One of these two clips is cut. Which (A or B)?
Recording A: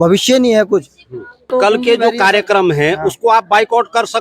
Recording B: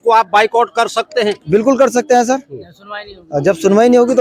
A